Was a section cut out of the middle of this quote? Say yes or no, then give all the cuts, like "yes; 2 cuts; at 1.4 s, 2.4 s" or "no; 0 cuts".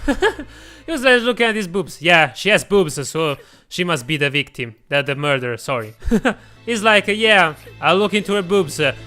yes; 1 cut; at 6.5 s